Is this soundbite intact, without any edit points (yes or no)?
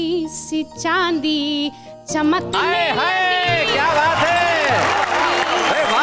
yes